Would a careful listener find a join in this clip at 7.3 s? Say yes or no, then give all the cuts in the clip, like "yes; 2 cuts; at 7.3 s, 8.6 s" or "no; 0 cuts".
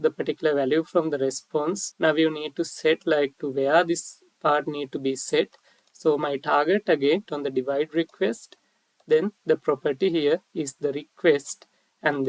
yes; 2 cuts; at 1.9 s, 7.3 s